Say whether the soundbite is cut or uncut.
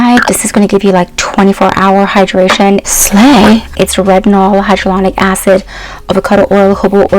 cut